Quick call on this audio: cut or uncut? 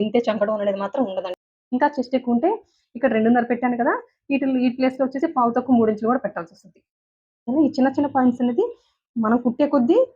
cut